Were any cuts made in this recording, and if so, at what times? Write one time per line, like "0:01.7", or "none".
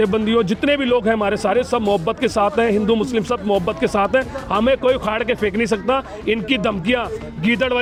none